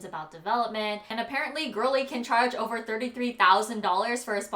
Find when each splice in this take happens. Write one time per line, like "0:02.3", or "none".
0:01.1

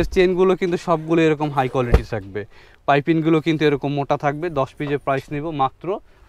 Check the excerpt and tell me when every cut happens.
none

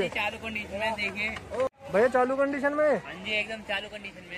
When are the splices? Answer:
0:01.7

